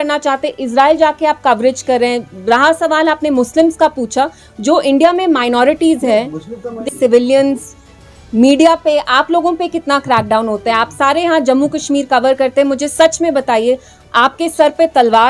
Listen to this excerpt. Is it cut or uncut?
uncut